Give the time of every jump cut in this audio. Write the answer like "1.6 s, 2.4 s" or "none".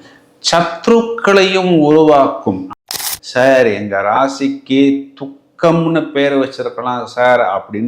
2.7 s